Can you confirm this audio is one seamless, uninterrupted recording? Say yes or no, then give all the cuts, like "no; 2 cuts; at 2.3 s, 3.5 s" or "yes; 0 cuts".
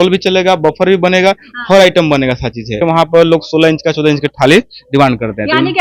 no; 1 cut; at 2.8 s